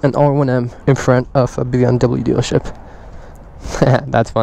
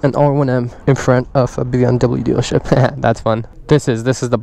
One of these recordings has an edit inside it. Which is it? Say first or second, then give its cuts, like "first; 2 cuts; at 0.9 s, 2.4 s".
second; 2 cuts; at 2.6 s, 3.5 s